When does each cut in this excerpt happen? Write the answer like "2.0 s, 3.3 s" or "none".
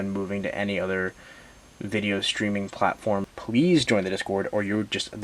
3.3 s